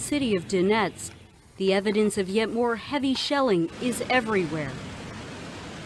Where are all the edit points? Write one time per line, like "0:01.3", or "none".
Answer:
0:03.2